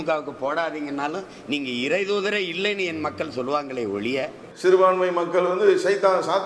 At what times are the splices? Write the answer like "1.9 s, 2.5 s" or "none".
4.4 s